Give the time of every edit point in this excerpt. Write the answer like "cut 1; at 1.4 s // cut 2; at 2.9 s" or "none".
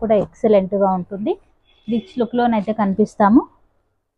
none